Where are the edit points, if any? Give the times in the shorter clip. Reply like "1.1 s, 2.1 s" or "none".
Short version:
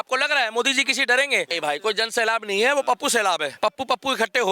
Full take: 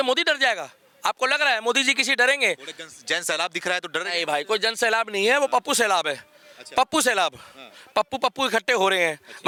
1.5 s, 3.5 s